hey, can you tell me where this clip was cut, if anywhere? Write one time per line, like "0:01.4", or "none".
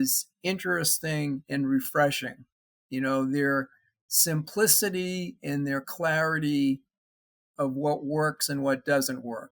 none